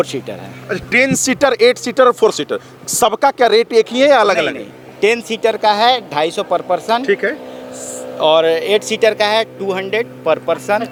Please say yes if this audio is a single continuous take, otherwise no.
yes